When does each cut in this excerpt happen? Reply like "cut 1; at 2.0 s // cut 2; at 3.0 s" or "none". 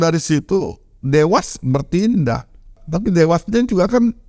cut 1; at 2.8 s